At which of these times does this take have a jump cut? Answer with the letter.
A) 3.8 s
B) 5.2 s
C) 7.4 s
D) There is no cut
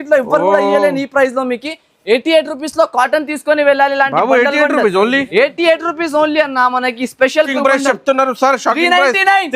C